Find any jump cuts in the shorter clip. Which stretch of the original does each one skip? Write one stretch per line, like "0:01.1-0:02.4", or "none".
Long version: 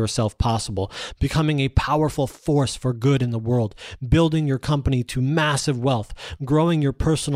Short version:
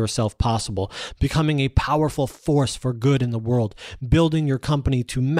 none